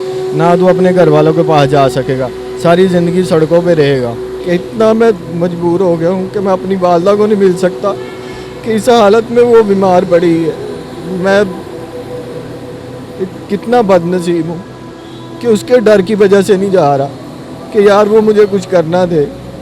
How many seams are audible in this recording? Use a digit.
1